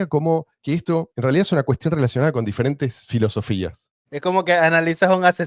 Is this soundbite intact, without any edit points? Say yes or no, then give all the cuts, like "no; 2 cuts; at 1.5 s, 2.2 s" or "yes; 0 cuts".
no; 2 cuts; at 1.1 s, 3.8 s